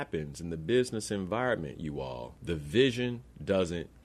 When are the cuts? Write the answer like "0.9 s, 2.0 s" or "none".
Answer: 2.3 s